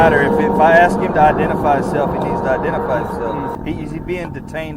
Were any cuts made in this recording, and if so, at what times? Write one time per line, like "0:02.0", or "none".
0:03.3